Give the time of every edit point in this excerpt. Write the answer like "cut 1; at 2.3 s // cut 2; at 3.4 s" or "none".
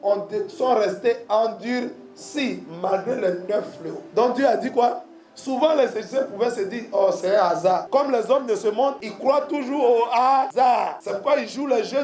cut 1; at 3.9 s // cut 2; at 7.8 s // cut 3; at 9.1 s // cut 4; at 10.7 s